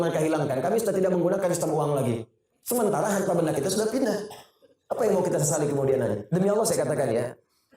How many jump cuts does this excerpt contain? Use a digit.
1